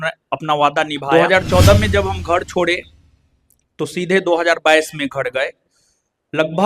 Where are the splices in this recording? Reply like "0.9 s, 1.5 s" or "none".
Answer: 1.1 s